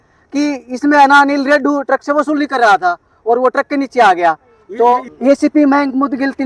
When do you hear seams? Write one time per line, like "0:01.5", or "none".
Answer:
0:05.1